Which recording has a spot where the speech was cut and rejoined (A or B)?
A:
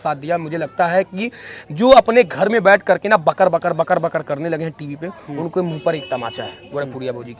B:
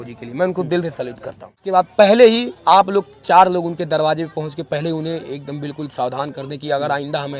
B